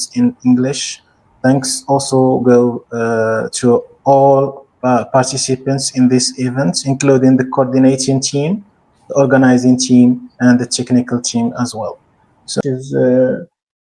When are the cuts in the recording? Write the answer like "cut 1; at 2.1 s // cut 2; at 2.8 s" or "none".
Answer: cut 1; at 12.6 s